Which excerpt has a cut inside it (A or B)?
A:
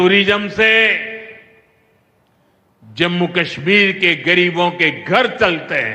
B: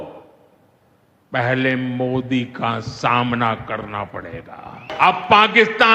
B